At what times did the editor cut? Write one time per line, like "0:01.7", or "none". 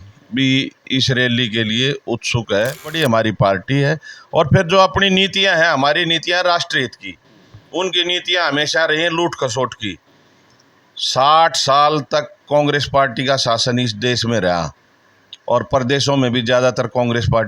0:03.0